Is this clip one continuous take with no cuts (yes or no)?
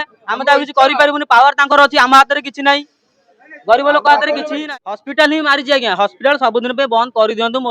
no